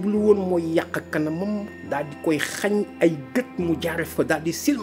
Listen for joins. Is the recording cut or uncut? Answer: uncut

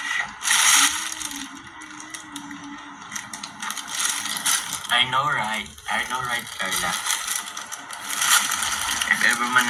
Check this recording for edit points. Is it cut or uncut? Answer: uncut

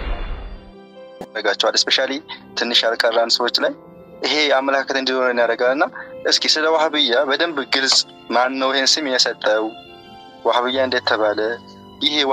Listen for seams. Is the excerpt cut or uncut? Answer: uncut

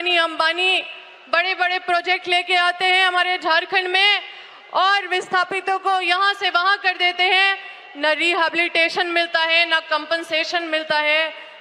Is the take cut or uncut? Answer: uncut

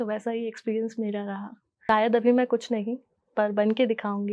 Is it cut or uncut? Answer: cut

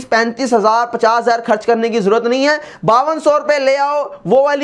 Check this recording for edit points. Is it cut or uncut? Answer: uncut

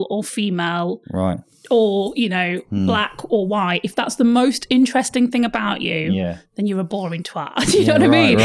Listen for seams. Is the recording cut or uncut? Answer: uncut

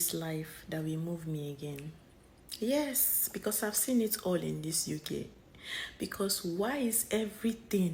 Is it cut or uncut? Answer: uncut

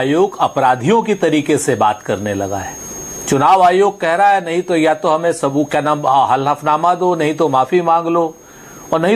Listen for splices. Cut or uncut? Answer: uncut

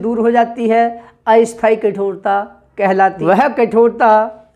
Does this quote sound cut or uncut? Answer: cut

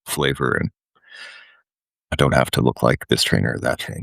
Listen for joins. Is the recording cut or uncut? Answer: cut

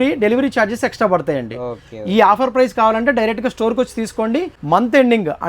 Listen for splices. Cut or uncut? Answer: cut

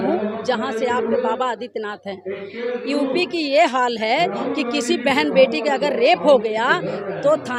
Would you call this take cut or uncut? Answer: uncut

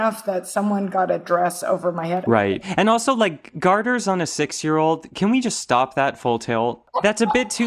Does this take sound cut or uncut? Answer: cut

